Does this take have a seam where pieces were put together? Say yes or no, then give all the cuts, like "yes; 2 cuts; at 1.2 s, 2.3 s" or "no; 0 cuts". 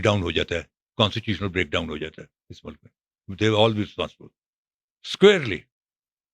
no; 0 cuts